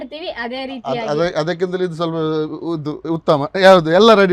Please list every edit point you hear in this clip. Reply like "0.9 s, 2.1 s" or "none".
none

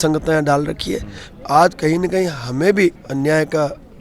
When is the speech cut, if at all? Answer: 1.2 s, 3.0 s

